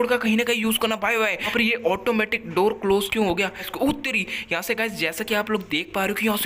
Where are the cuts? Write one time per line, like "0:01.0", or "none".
0:01.5
0:03.7